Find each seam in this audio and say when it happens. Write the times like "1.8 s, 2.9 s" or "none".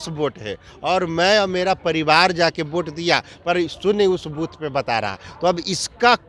none

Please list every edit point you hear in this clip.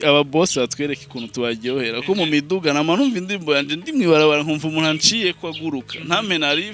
none

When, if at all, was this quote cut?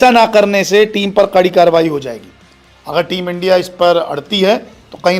none

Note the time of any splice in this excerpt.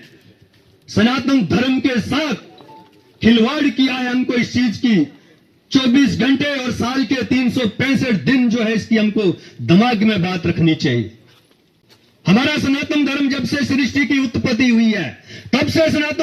none

